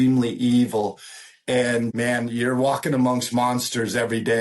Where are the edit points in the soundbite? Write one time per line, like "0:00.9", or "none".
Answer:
0:01.9